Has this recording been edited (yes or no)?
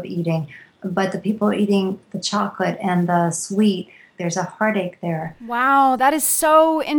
yes